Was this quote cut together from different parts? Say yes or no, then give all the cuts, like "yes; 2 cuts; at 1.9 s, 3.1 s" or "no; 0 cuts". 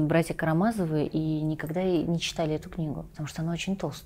yes; 1 cut; at 3.1 s